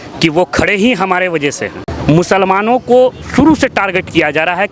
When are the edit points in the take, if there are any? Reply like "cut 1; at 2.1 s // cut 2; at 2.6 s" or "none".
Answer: cut 1; at 1.8 s